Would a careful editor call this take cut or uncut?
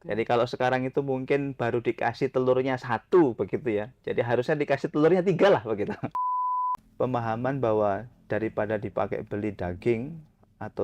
cut